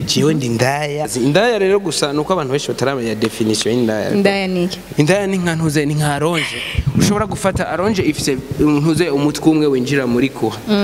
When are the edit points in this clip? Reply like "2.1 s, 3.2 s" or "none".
1.1 s, 4.8 s